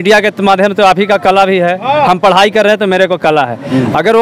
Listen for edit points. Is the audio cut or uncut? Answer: uncut